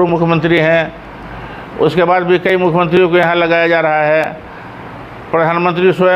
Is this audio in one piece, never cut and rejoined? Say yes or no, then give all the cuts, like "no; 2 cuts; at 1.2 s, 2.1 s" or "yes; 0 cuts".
yes; 0 cuts